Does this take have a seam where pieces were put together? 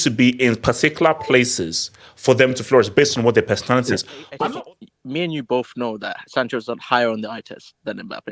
yes; 1 cut; at 4.3 s

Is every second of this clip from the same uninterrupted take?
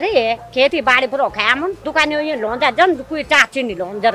no; 1 cut; at 1.8 s

